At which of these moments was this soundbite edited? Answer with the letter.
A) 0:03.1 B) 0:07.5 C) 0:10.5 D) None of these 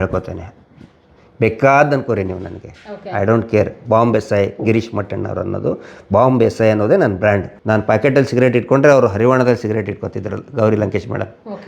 B